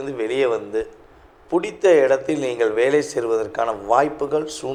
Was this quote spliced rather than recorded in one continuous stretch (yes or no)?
no